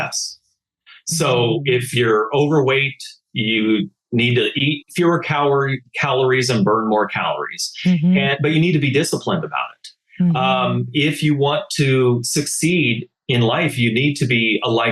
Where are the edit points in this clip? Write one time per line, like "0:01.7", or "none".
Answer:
none

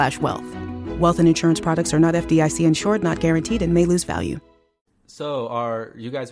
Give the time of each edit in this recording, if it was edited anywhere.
0:04.7

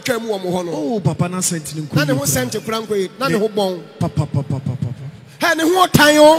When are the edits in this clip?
none

